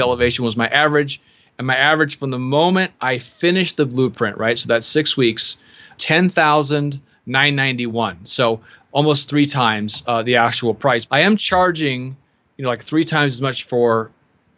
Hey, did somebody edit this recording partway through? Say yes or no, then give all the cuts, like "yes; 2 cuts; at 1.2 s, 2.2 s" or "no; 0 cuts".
yes; 2 cuts; at 5.9 s, 11.0 s